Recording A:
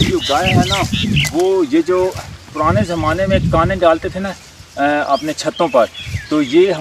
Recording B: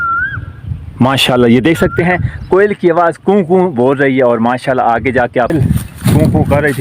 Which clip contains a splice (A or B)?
B